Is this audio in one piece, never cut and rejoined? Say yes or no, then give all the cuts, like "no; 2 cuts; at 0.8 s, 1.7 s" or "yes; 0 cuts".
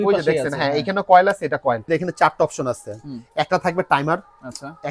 no; 1 cut; at 1.9 s